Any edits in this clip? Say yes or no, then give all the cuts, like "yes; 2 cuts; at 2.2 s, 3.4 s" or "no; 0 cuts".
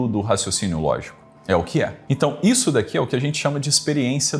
yes; 1 cut; at 2.0 s